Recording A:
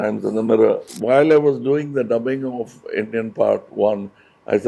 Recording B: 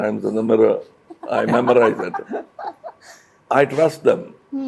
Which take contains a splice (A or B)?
A